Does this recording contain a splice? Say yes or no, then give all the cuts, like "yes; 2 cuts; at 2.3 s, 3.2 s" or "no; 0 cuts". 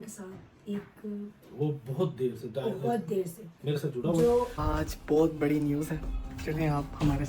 yes; 1 cut; at 4.5 s